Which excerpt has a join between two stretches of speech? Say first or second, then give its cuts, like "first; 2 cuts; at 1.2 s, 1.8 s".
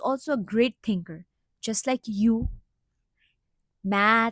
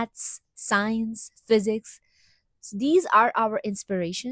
first; 1 cut; at 3.3 s